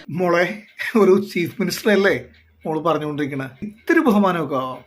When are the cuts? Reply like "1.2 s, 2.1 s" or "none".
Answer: 3.7 s